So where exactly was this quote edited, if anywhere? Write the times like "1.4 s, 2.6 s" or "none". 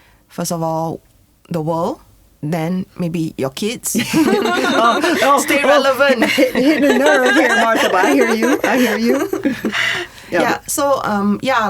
none